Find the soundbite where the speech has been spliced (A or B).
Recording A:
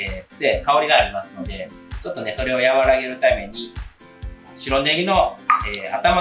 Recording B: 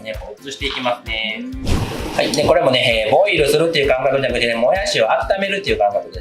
B